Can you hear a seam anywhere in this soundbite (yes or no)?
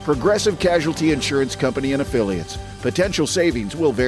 no